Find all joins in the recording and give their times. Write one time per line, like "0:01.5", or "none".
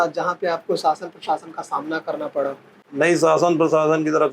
0:02.8